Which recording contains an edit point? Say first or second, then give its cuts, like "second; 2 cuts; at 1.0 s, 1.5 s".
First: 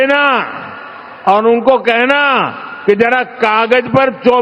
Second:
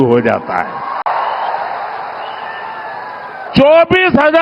second; 2 cuts; at 1.0 s, 3.5 s